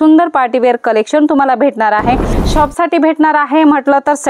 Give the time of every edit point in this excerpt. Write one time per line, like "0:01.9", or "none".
0:02.3